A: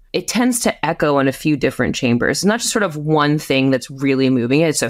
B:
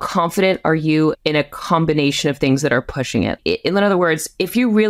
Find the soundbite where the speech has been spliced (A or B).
B